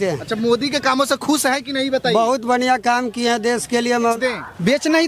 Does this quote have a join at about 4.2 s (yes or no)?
yes